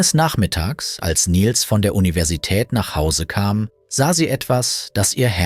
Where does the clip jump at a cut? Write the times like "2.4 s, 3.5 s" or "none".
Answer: 3.8 s